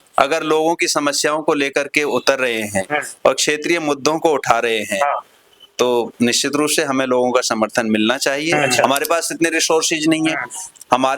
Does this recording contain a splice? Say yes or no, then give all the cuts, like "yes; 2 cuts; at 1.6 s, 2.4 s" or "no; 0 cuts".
yes; 1 cut; at 8.7 s